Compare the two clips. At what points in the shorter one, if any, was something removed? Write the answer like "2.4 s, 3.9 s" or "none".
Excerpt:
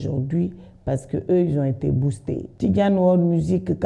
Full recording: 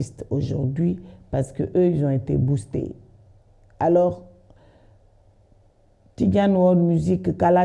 2.5 s

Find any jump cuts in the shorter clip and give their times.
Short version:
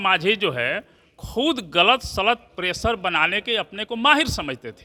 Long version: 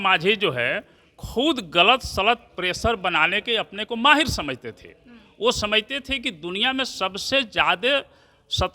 none

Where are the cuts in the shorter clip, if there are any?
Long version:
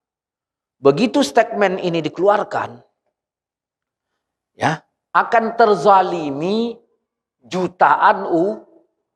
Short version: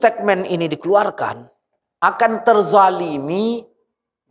1.8 s

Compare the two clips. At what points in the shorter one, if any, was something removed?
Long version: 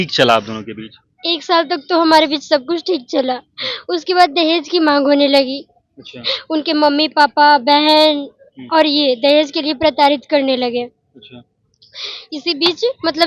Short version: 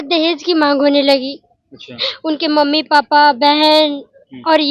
none

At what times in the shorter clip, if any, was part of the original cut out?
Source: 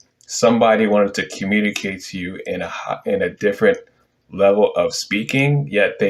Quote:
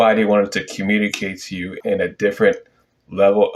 1.8 s

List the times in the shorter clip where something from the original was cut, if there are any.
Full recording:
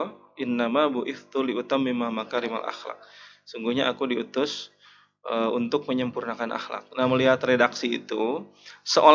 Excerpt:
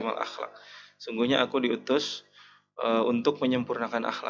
none

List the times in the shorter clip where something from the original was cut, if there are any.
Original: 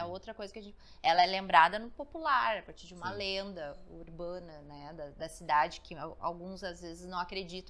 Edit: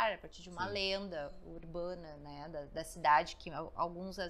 none

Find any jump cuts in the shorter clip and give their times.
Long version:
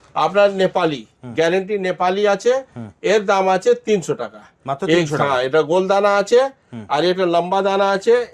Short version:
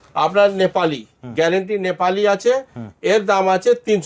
none

